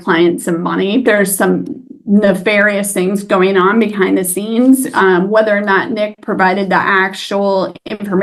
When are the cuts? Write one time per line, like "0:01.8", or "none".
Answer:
0:01.0